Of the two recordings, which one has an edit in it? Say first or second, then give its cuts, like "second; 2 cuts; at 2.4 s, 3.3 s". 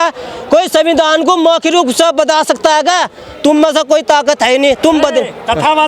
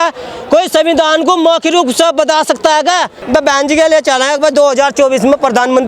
second; 1 cut; at 3.2 s